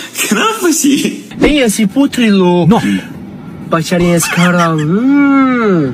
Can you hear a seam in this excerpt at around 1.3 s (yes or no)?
yes